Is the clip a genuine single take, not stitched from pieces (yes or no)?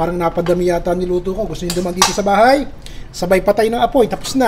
yes